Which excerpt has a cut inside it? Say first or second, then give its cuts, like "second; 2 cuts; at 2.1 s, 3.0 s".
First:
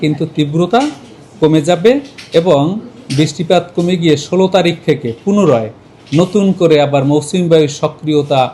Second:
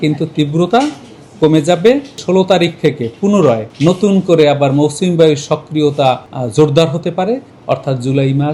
second; 4 cuts; at 2.2 s, 3.7 s, 6.3 s, 7.5 s